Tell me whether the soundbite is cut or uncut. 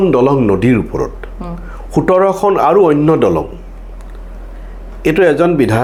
uncut